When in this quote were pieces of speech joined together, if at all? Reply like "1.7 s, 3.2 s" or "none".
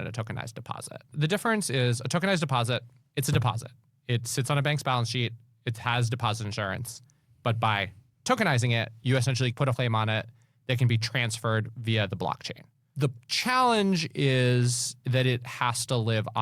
1.1 s, 9.8 s, 12.9 s

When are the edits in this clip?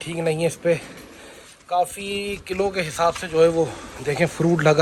none

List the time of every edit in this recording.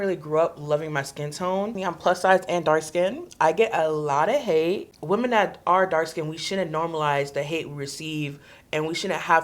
1.8 s, 4.9 s

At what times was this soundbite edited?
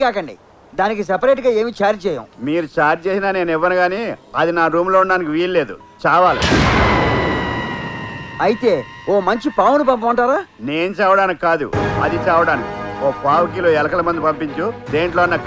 none

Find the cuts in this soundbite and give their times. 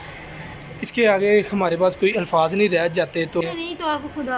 3.4 s

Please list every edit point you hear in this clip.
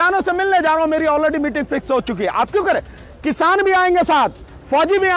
none

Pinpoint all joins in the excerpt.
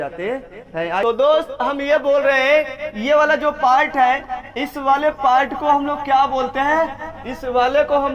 1.0 s

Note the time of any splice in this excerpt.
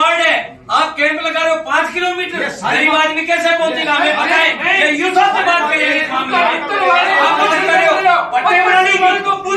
none

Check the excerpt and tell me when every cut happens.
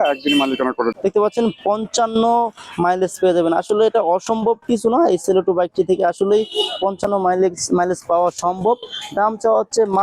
1.0 s

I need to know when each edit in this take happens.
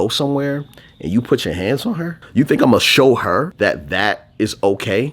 2.2 s, 3.5 s

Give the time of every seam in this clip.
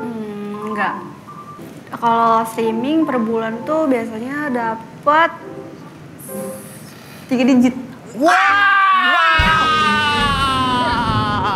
1.6 s

